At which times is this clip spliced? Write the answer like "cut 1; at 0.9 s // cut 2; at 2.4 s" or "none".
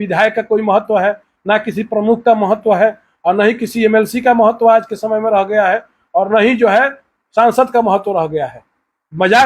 none

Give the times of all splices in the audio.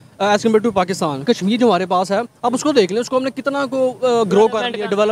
cut 1; at 1.2 s

